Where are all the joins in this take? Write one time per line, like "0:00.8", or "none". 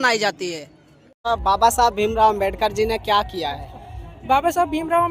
0:01.3